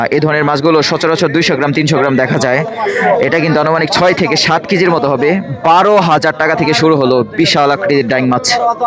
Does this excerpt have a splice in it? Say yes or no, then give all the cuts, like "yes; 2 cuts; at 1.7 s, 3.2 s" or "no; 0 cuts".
no; 0 cuts